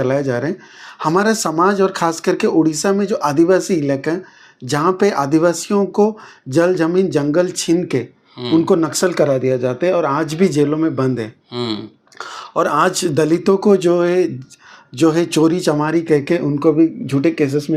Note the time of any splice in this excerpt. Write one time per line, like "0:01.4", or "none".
none